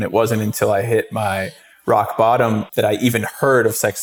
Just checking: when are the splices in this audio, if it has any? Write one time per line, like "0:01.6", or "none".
0:02.7